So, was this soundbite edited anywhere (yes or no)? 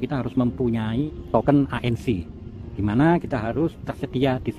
yes